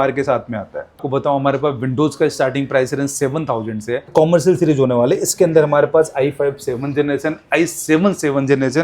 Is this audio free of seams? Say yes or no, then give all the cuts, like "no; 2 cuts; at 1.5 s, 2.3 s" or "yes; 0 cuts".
no; 2 cuts; at 1.0 s, 4.1 s